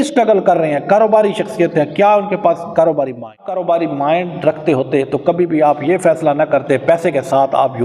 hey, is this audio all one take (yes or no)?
no